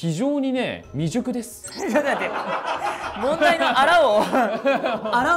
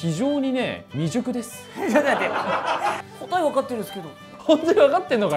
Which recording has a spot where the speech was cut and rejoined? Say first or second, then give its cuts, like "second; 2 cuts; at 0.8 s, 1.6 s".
second; 2 cuts; at 3.1 s, 4.3 s